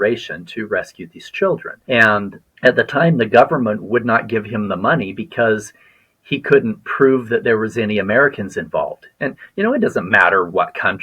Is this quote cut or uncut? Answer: cut